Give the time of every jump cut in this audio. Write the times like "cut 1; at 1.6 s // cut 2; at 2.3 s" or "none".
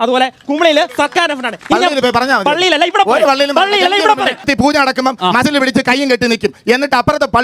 cut 1; at 4.5 s